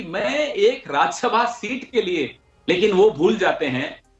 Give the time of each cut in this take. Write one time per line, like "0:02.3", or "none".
0:02.4